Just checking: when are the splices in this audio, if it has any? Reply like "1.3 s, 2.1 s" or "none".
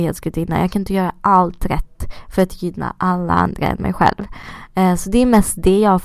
none